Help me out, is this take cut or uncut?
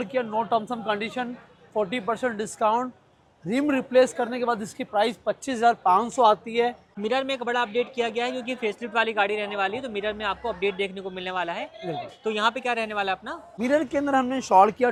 uncut